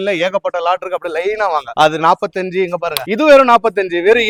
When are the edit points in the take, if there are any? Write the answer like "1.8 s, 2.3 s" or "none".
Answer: none